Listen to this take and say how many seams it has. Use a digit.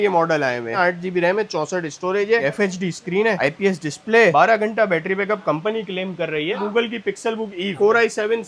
3